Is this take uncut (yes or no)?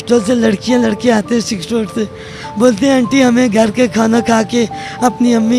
yes